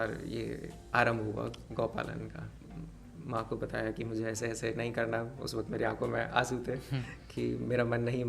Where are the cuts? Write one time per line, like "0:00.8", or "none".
0:02.6